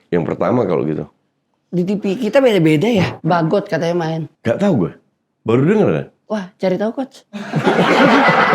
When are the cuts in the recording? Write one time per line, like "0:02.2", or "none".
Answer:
0:03.1